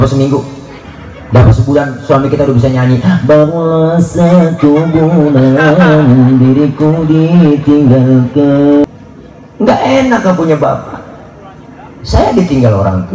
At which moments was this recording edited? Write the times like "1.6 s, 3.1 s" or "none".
8.8 s